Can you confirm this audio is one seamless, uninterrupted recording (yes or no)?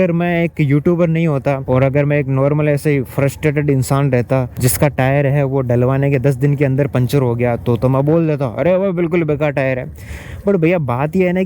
no